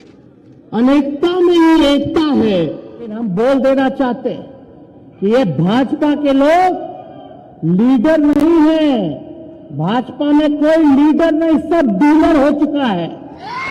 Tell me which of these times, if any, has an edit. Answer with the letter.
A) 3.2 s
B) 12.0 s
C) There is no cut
A